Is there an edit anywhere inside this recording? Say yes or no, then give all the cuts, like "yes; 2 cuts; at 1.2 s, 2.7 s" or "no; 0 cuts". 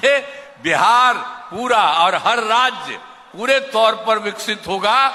no; 0 cuts